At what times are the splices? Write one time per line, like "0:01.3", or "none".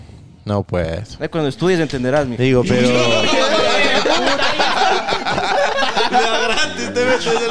none